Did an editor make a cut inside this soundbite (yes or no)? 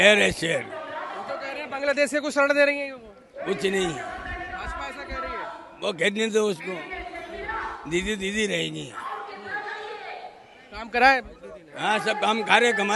no